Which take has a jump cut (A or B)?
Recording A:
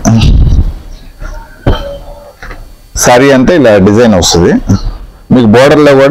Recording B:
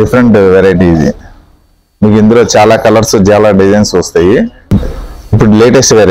B